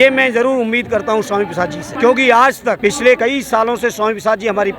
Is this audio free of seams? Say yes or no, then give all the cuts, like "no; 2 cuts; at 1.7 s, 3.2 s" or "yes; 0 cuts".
no; 2 cuts; at 1.9 s, 3.0 s